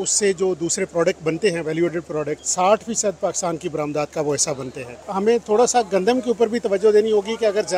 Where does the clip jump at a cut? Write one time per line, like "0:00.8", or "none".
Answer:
0:02.4
0:05.1